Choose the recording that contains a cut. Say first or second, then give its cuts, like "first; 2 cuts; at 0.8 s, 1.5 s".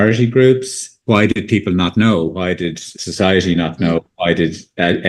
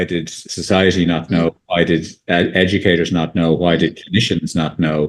first; 1 cut; at 0.9 s